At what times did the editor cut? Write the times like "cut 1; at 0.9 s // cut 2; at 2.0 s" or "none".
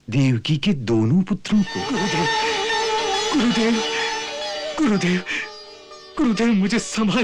cut 1; at 1.8 s